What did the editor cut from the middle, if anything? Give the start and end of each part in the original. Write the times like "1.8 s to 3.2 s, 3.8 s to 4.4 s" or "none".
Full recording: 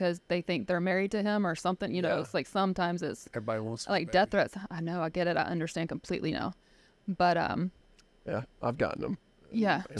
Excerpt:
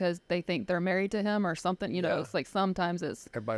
none